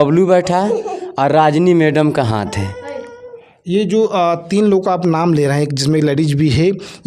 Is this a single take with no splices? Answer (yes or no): yes